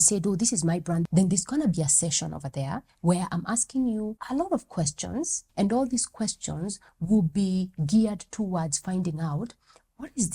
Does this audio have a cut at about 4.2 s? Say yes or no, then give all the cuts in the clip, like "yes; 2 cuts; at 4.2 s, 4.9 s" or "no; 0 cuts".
yes; 3 cuts; at 1.1 s, 4.2 s, 5.4 s